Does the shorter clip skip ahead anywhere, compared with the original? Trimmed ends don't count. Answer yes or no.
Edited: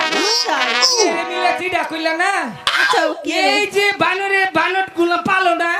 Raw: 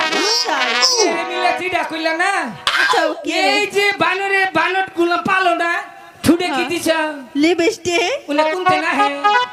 no